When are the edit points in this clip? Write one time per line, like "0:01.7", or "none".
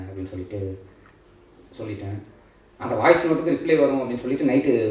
none